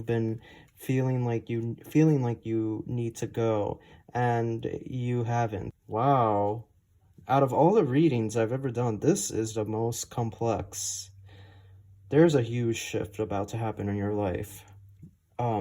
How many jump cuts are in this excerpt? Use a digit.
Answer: 1